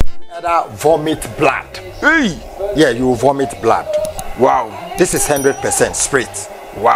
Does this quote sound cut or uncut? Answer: cut